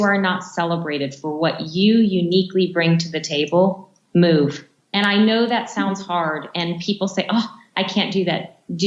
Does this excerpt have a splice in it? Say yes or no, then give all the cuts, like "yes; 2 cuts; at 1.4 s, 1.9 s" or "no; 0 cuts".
no; 0 cuts